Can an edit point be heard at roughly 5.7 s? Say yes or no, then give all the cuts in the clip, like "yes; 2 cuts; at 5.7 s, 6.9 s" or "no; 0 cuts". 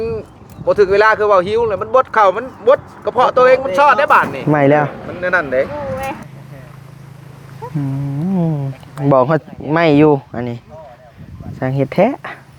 yes; 3 cuts; at 4.3 s, 5.0 s, 5.7 s